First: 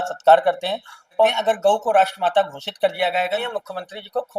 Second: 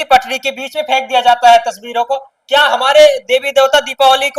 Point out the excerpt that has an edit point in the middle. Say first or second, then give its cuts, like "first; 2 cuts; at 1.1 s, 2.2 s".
first; 2 cuts; at 1.3 s, 3.5 s